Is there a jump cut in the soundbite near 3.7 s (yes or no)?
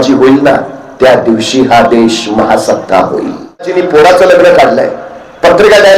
yes